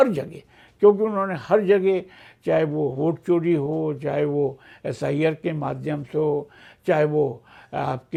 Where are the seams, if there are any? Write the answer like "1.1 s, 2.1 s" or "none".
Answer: none